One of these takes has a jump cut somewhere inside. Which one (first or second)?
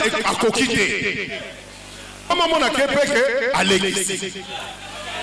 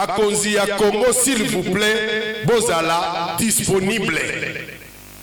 first